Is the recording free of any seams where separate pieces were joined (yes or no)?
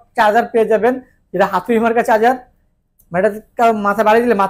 yes